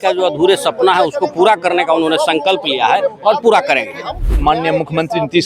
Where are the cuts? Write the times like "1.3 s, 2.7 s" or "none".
4.2 s